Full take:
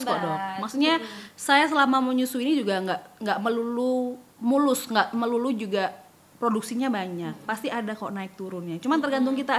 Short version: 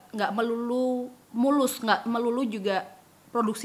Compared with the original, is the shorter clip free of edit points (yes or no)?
yes